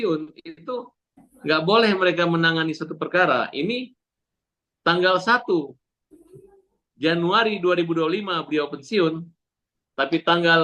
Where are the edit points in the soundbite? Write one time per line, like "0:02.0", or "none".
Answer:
none